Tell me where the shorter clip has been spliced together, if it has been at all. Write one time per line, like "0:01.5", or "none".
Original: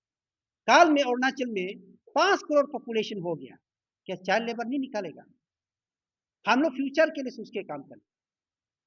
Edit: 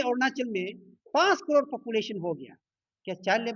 none